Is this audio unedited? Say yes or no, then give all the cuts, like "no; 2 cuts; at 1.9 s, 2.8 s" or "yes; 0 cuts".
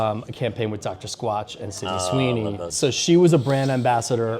no; 1 cut; at 2.7 s